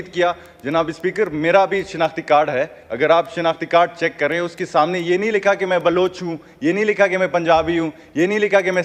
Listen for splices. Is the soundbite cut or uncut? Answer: uncut